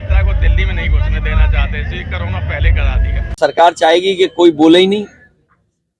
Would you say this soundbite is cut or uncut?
cut